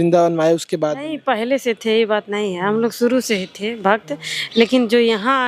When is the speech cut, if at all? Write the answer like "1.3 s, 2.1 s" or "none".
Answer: none